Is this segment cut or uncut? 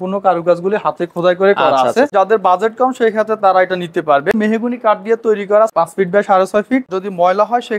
cut